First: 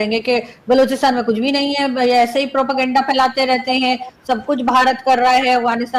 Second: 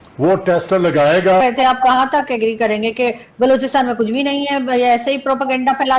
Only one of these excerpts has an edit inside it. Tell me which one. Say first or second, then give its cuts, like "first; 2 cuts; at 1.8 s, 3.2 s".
second; 1 cut; at 1.4 s